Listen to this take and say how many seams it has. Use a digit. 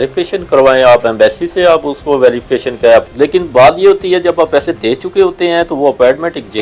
1